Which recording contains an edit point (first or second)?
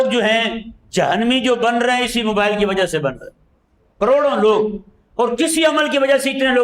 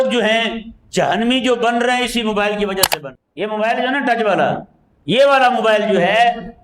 second